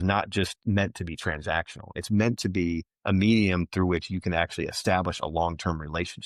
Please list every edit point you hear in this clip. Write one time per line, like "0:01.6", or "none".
none